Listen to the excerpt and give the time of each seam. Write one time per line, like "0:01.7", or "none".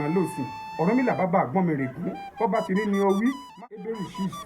0:03.5